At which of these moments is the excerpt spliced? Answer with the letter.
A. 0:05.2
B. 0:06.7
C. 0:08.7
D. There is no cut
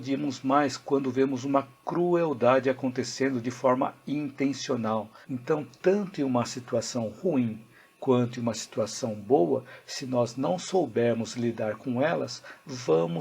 A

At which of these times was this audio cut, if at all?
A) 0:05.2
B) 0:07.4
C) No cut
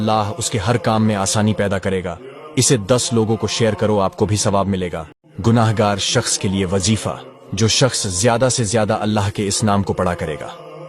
A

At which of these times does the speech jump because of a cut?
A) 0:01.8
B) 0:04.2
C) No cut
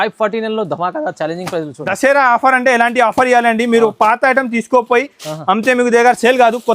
A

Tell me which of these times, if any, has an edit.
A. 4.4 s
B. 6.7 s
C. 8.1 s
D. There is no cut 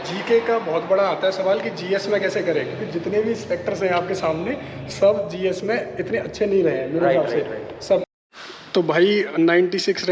C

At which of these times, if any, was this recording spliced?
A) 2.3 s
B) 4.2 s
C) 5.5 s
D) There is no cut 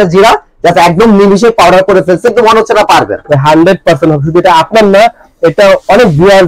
A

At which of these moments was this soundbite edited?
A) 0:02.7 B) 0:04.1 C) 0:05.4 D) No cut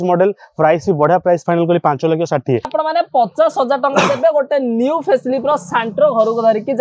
A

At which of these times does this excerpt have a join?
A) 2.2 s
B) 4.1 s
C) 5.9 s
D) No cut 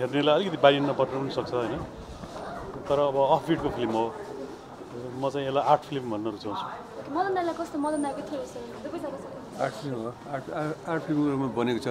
D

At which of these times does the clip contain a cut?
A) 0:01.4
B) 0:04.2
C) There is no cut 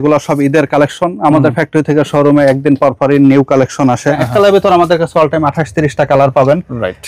B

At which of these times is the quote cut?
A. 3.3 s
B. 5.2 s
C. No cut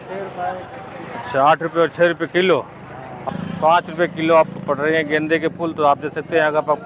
A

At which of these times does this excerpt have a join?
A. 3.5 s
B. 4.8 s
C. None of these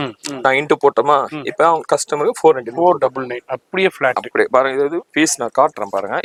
C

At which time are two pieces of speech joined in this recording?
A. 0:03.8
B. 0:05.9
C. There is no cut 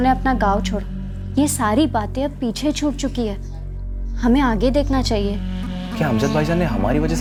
C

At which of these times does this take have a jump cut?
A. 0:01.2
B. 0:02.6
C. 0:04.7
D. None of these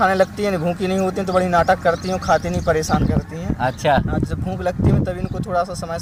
D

